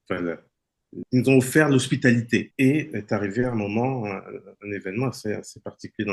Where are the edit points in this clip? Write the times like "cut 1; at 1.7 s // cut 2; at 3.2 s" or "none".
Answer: cut 1; at 1.1 s // cut 2; at 2.5 s

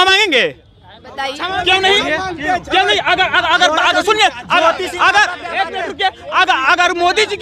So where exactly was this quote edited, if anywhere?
cut 1; at 1.5 s

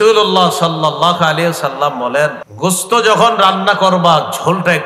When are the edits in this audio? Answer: cut 1; at 2.4 s

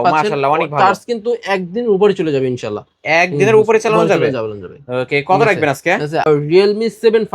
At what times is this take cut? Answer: cut 1; at 6.3 s

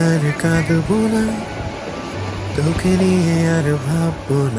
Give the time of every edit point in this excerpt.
none

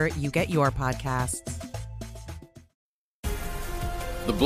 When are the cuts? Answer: cut 1; at 2.6 s

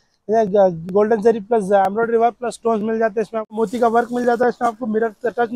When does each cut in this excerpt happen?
cut 1; at 3.6 s

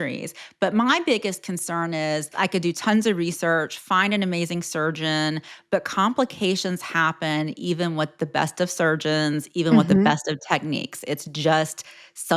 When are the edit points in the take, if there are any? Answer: cut 1; at 2.3 s

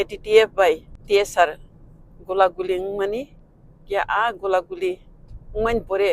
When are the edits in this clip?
cut 1; at 0.9 s

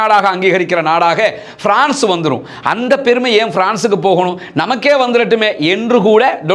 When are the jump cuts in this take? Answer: none

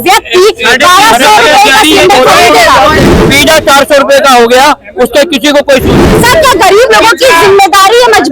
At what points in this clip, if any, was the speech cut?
cut 1; at 3.0 s // cut 2; at 6.0 s

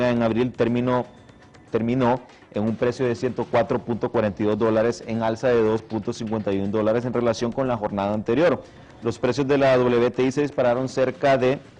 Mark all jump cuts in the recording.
none

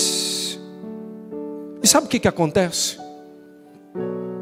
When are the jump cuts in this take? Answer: none

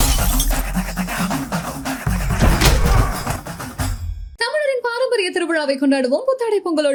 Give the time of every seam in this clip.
none

